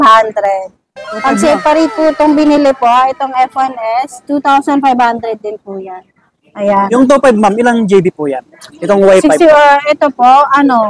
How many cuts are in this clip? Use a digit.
0